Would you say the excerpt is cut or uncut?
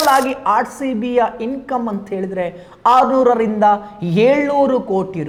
uncut